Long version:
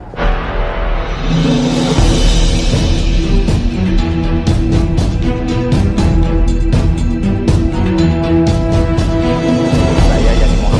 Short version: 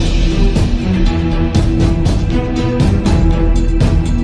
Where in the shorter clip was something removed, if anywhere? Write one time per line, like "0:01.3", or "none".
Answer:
none